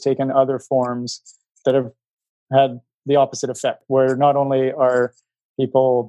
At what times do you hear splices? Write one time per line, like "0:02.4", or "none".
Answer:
0:01.9
0:03.8